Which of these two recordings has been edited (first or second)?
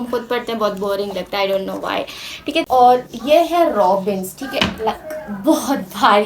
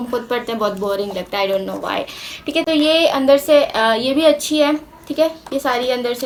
first